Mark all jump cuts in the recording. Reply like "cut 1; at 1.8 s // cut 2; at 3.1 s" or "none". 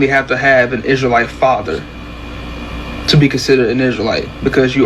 cut 1; at 3.4 s